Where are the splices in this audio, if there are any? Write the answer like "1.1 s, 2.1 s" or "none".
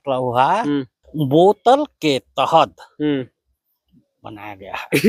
1.0 s

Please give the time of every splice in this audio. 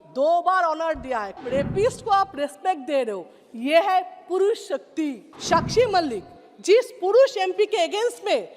1.4 s, 5.3 s

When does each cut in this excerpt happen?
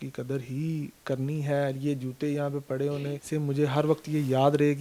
3.2 s

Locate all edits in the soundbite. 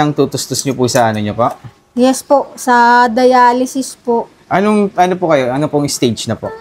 none

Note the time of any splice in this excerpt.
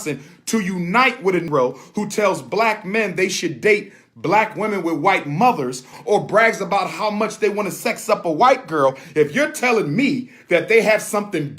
1.5 s, 5.9 s

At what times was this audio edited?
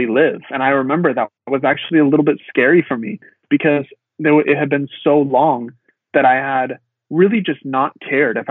none

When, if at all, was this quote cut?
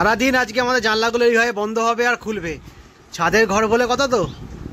none

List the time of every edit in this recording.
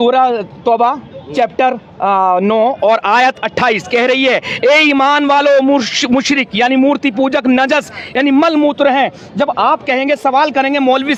none

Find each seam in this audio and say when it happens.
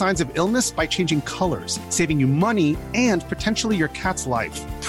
none

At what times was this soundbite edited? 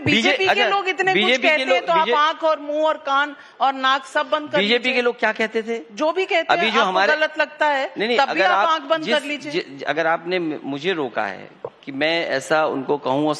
12.4 s

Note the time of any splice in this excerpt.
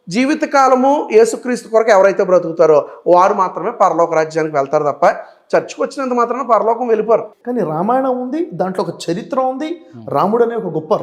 7.3 s

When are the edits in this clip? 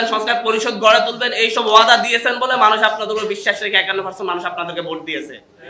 none

